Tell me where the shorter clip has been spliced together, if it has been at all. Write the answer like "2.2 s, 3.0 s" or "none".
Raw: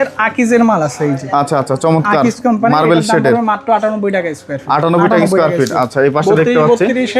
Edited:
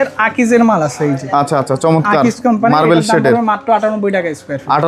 none